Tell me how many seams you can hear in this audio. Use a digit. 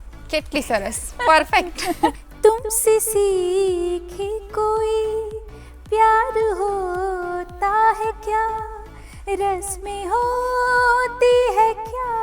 1